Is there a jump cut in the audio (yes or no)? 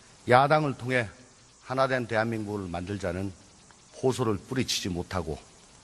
yes